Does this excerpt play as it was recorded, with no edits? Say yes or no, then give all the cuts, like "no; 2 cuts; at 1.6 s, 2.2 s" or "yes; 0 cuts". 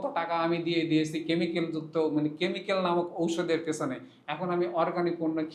yes; 0 cuts